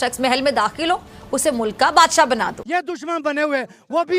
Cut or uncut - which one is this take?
cut